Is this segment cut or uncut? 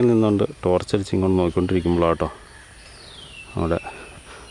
uncut